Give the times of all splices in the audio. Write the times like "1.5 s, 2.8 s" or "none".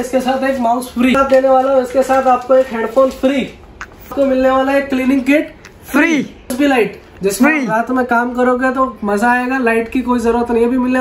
1.2 s, 4.1 s, 6.5 s